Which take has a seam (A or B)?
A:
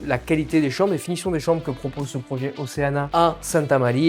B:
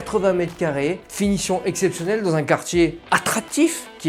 A